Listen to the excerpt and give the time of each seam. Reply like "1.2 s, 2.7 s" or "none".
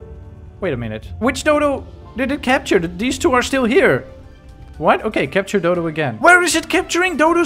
1.1 s, 6.1 s